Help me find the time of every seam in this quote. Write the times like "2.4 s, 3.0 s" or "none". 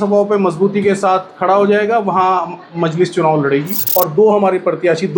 3.8 s